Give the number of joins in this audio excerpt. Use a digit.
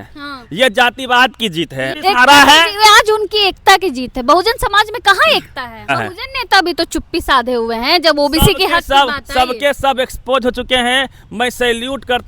2